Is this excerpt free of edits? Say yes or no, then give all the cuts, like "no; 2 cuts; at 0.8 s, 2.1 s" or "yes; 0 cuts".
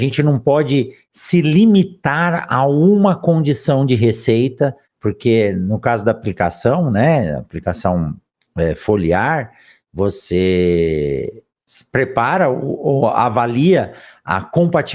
yes; 0 cuts